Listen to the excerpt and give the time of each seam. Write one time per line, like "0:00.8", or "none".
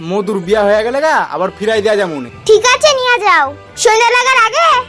0:02.3